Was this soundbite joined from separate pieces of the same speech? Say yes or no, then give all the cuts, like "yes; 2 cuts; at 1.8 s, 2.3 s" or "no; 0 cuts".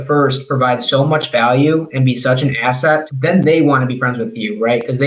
no; 0 cuts